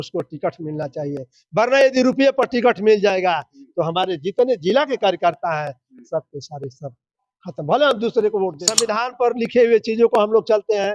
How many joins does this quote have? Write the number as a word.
one